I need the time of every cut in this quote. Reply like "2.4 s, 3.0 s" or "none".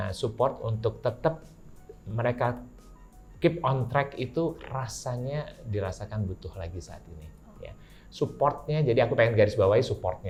none